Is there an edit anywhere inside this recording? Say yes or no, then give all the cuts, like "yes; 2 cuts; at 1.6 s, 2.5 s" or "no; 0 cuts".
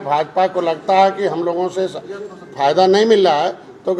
no; 0 cuts